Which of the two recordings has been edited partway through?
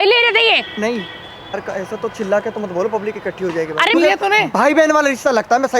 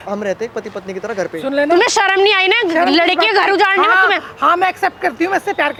first; 2 cuts; at 1.6 s, 3.9 s

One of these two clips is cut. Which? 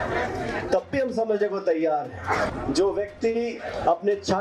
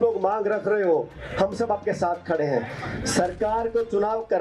first; 1 cut; at 2.5 s

